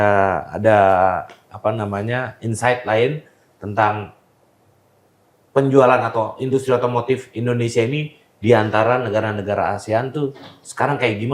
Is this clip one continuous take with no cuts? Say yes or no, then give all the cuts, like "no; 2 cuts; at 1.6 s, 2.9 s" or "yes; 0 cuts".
yes; 0 cuts